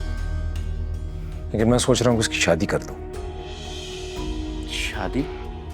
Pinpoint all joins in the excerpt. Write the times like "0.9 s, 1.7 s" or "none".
1.4 s